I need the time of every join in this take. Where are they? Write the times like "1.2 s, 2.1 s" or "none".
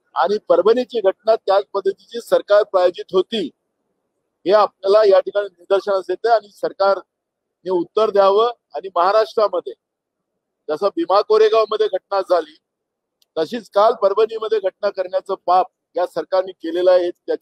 none